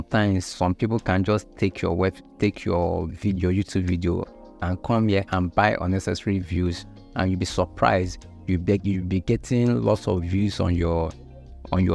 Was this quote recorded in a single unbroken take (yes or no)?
yes